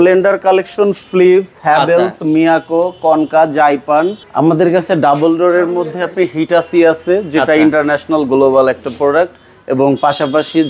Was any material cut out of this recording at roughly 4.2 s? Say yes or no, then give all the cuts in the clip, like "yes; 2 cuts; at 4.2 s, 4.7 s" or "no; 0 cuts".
yes; 1 cut; at 4.2 s